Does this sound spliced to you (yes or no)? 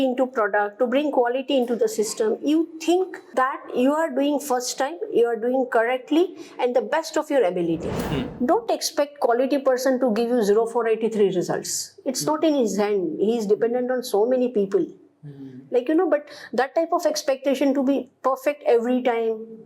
yes